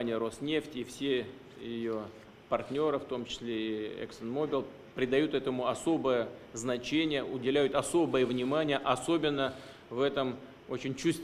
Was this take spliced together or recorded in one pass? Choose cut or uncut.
uncut